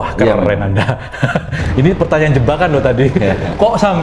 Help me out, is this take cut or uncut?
uncut